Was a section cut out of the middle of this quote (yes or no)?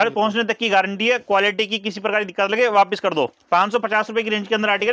yes